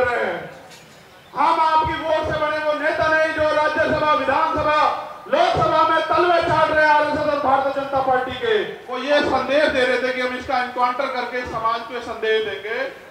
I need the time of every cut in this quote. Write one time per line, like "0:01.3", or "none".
0:08.9